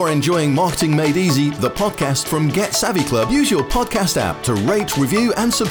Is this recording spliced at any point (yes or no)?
no